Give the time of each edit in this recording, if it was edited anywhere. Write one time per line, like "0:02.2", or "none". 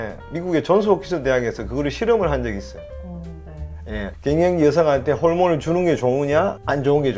none